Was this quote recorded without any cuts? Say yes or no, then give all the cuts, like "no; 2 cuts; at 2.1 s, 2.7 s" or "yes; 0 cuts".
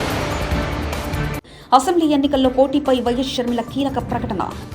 no; 1 cut; at 1.2 s